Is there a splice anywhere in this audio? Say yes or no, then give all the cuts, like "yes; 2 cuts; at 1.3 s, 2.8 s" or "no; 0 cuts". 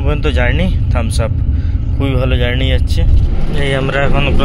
yes; 1 cut; at 3.3 s